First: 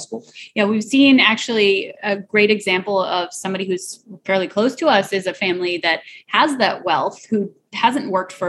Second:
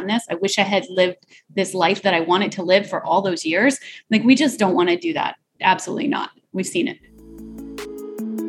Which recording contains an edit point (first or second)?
second